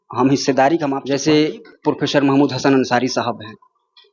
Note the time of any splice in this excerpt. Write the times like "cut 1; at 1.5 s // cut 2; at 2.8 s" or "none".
cut 1; at 1.0 s